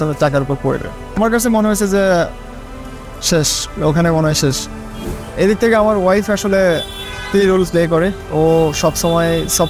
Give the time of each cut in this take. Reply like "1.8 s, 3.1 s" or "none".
1.2 s, 5.0 s

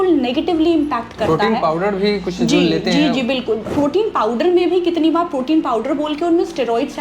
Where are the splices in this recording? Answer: 3.7 s

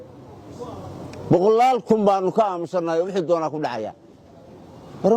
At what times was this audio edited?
none

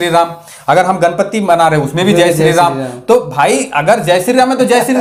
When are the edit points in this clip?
none

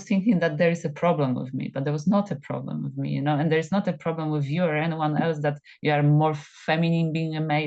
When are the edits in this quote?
none

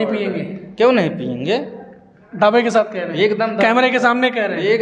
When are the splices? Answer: none

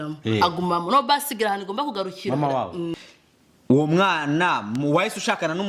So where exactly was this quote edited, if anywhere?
2.9 s

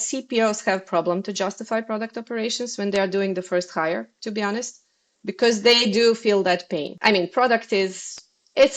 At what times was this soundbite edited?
7.0 s

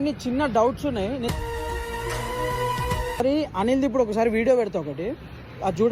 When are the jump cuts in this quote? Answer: 3.2 s

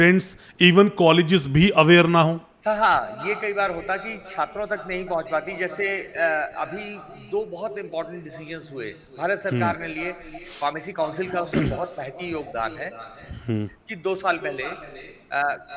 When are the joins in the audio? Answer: 2.5 s

